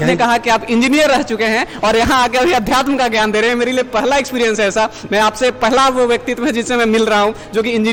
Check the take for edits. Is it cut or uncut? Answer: uncut